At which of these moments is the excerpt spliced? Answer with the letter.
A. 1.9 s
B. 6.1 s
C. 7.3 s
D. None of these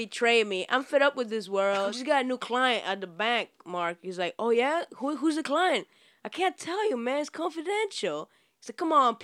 A